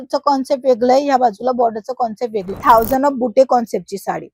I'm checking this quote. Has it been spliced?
yes; 1 cut; at 2.6 s

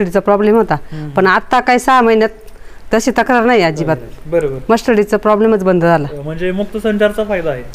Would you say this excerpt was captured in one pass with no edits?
yes; 0 cuts

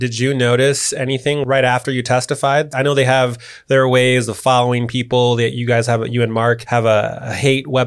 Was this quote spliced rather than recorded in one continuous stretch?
no; 0 cuts

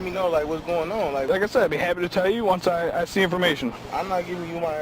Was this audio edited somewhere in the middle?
yes; 1 cut; at 1.3 s

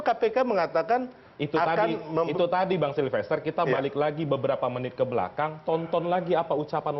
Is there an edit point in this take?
no; 0 cuts

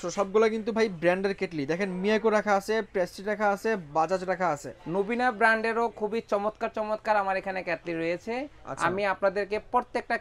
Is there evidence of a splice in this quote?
no; 0 cuts

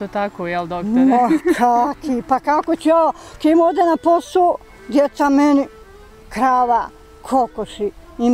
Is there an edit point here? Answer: no; 0 cuts

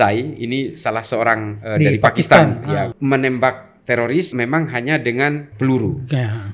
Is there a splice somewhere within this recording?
yes; 3 cuts; at 2.9 s, 4.3 s, 5.5 s

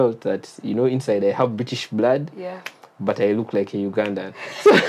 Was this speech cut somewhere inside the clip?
no; 0 cuts

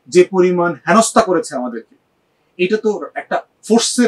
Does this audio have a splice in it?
no; 0 cuts

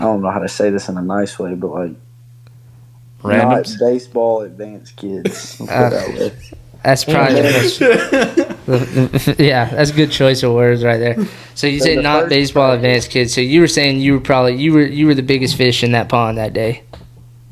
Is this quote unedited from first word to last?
yes; 0 cuts

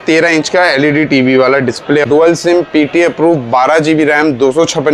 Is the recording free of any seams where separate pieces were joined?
no; 1 cut; at 2.0 s

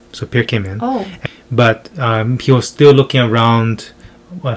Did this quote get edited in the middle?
yes; 1 cut; at 1.1 s

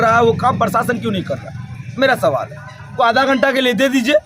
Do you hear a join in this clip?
yes; 1 cut; at 2.9 s

